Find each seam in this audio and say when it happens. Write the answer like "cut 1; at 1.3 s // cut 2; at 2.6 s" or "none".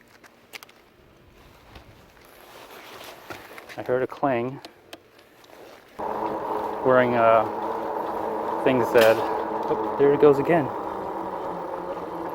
cut 1; at 6.0 s